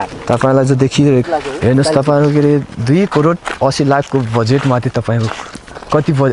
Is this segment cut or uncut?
uncut